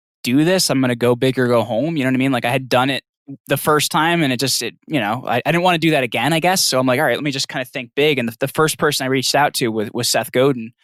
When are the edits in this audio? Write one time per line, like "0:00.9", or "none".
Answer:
none